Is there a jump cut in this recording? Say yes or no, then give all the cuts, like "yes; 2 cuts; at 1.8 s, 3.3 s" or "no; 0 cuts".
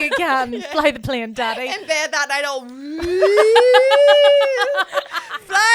no; 0 cuts